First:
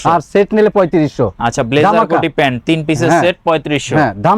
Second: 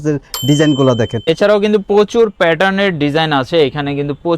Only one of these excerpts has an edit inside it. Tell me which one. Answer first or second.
second